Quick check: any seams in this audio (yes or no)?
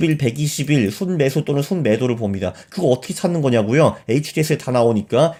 no